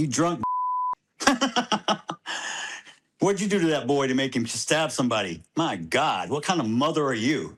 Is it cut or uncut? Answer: uncut